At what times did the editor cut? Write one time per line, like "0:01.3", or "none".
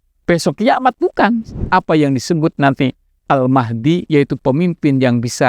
0:01.6

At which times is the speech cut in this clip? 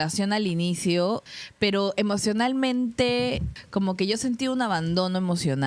0:01.3
0:03.5

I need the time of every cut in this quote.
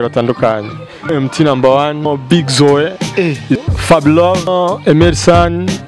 0:01.1
0:02.1
0:03.6
0:04.5

